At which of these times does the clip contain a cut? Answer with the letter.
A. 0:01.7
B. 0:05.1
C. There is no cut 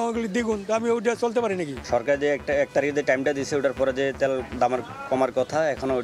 A